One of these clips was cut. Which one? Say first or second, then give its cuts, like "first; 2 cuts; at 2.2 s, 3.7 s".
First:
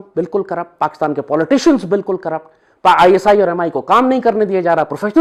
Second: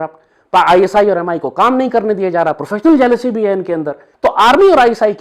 second; 1 cut; at 4.0 s